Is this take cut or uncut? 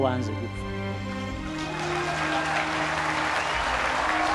uncut